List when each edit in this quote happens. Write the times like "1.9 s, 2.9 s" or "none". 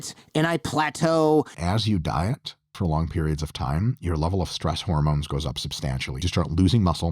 1.6 s, 2.8 s, 6.2 s